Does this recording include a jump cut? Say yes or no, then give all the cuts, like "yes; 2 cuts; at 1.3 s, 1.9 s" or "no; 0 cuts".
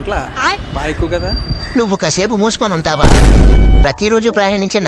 yes; 1 cut; at 3.8 s